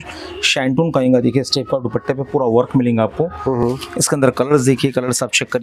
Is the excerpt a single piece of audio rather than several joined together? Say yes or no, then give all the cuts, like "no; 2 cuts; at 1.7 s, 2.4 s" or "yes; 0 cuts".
yes; 0 cuts